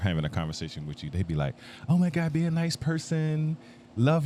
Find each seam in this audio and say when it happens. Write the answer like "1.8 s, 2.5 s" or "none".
none